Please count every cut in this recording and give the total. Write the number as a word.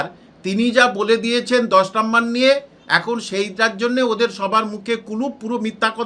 zero